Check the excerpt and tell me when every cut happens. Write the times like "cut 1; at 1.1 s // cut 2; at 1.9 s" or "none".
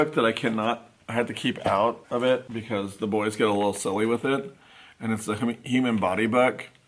none